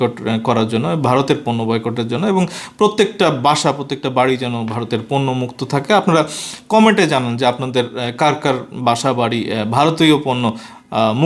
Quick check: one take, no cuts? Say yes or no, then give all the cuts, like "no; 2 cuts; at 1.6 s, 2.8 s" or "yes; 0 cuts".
yes; 0 cuts